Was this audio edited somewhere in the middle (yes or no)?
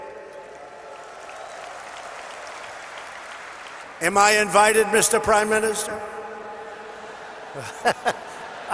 yes